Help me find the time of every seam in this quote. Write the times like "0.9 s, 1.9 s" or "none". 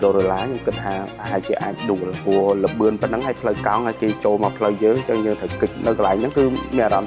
5.7 s